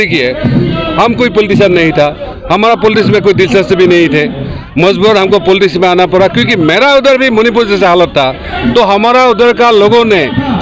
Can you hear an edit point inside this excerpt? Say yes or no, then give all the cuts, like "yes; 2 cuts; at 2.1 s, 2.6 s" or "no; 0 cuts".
no; 0 cuts